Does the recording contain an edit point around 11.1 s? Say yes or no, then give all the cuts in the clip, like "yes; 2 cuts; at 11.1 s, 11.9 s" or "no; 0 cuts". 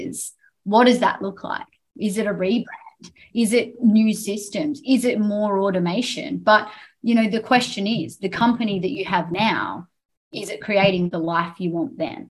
yes; 1 cut; at 11.1 s